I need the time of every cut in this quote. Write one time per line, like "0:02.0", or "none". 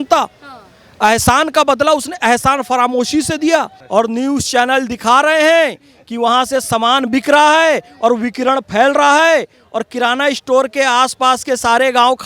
0:03.8